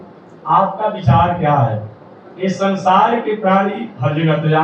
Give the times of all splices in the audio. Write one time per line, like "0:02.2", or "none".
none